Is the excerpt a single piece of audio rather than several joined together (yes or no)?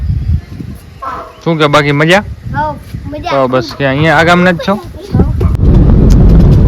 no